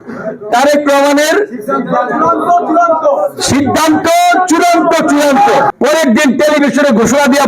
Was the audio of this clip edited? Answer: yes; 1 cut; at 5.7 s

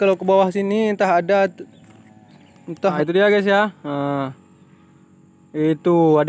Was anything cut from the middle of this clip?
yes; 1 cut; at 3.0 s

